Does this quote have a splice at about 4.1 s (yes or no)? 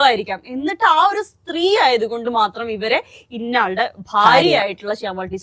no